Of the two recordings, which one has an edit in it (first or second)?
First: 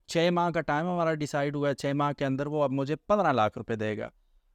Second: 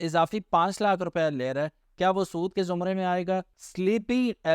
second